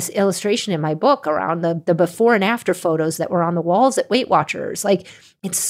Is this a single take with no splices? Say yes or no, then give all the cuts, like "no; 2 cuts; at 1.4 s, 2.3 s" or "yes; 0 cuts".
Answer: yes; 0 cuts